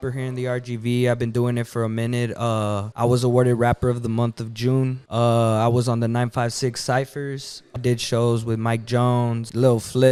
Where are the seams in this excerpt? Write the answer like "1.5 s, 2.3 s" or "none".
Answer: none